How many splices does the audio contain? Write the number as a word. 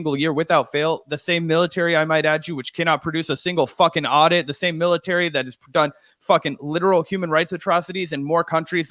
zero